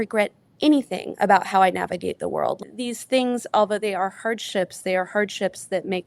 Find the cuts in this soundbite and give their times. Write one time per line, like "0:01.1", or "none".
0:02.6